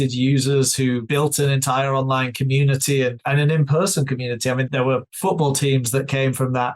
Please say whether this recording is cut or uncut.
uncut